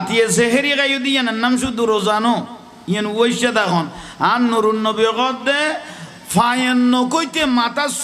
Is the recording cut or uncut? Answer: uncut